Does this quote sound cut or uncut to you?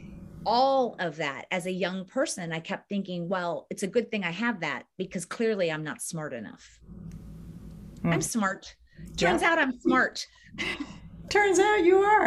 uncut